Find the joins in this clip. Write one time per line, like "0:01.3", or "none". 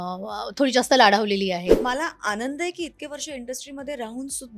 0:01.8